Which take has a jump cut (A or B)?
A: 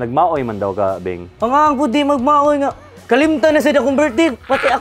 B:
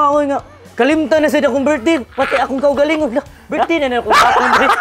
A